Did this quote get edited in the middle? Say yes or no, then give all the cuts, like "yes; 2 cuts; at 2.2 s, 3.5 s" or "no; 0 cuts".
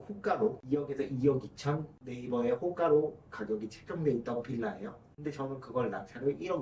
no; 0 cuts